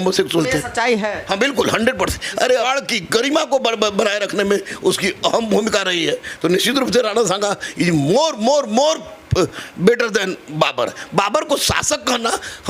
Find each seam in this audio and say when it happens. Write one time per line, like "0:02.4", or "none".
0:02.7